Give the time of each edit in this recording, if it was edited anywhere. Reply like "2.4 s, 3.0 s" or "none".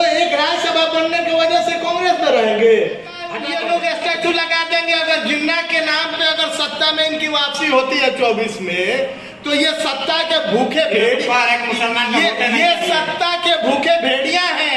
3.5 s